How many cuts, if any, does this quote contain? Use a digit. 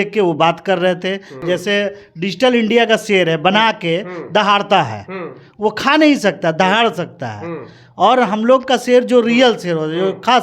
1